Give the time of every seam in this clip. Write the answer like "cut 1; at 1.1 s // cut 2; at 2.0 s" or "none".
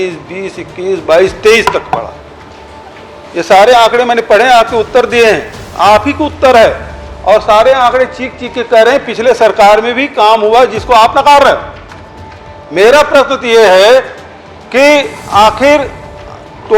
none